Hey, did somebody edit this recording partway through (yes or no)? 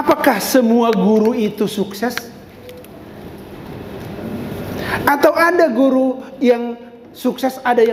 no